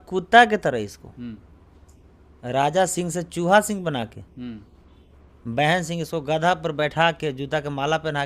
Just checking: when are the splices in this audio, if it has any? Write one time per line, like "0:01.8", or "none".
none